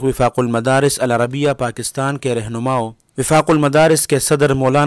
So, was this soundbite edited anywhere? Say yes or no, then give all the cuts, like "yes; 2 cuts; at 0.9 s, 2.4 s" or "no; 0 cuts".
yes; 1 cut; at 3.0 s